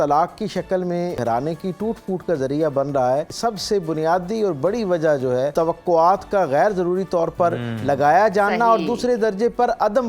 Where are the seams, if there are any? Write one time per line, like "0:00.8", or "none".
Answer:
0:01.2
0:03.3
0:05.5